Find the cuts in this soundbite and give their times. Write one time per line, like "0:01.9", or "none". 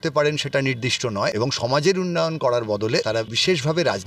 0:01.3
0:03.2